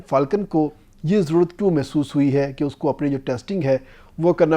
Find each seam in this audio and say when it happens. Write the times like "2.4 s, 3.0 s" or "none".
none